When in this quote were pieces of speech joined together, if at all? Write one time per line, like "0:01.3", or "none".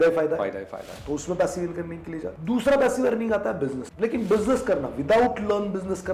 0:02.3
0:03.8